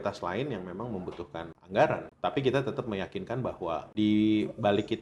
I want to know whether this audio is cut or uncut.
cut